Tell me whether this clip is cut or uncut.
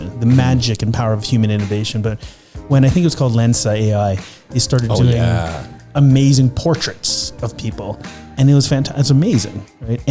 uncut